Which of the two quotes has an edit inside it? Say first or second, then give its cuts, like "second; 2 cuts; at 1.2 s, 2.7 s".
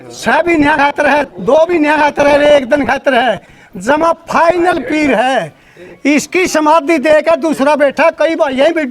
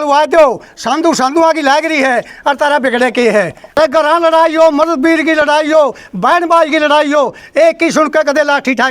second; 1 cut; at 3.6 s